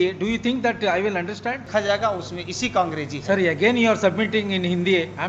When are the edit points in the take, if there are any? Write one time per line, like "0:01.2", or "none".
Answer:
0:01.7